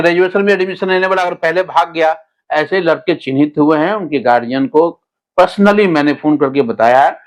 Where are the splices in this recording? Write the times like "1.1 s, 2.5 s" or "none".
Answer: none